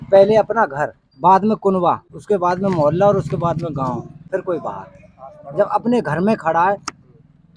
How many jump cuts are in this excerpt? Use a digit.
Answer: 3